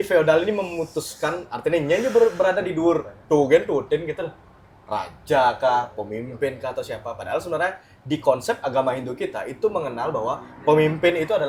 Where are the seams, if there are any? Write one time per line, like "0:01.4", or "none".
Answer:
none

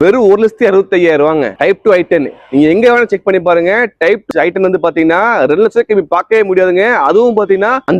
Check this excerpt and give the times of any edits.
none

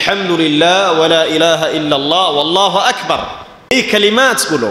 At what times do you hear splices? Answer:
0:03.7

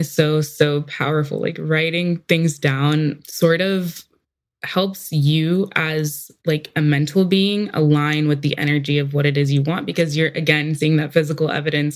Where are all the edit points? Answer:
none

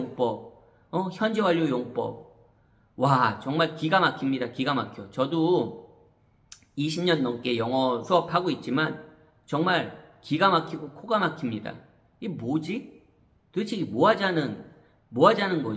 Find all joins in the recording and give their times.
0:08.0

